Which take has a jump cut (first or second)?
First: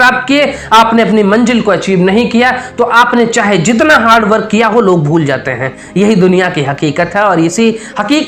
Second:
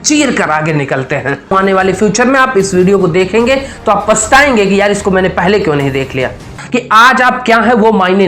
second